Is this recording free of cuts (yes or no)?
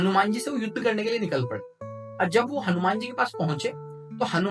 yes